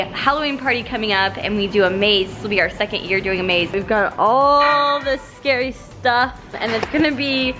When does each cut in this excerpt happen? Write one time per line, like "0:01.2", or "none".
0:03.7
0:06.5